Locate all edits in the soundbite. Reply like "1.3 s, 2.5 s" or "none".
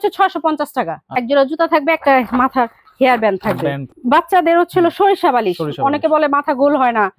1.0 s, 3.9 s